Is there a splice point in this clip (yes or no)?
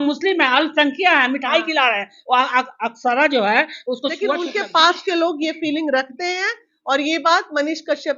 yes